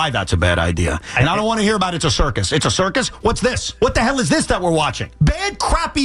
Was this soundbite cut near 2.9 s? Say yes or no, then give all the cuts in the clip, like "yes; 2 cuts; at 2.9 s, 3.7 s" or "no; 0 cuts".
no; 0 cuts